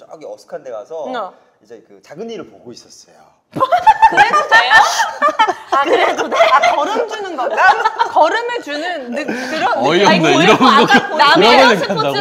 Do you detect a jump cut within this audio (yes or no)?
no